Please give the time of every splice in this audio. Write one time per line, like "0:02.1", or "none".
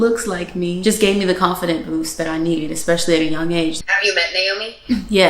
0:03.8